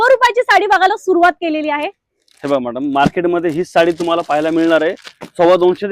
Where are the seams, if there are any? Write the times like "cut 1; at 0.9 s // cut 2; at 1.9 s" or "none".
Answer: none